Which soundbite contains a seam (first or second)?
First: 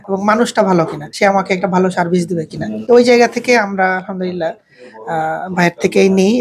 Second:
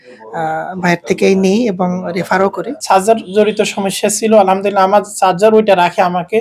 second